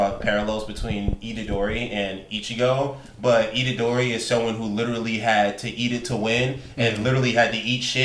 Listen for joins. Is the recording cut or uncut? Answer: uncut